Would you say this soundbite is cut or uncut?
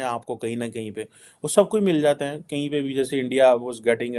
uncut